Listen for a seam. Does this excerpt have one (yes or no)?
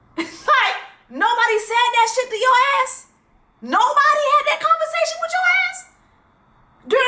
no